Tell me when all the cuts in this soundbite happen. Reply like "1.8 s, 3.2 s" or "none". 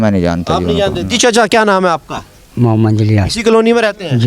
none